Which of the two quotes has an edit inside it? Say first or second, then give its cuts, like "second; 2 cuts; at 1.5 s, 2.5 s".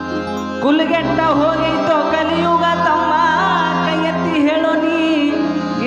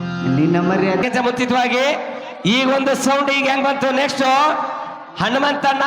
second; 1 cut; at 1.0 s